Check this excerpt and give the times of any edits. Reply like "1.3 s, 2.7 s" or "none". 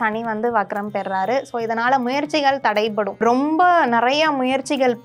3.2 s